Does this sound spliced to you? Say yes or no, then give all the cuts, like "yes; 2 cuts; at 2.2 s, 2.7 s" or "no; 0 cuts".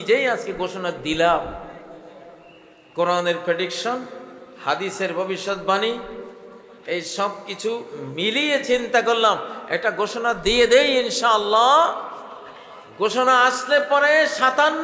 no; 0 cuts